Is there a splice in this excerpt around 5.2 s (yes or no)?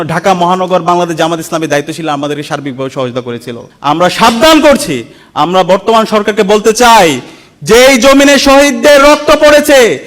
no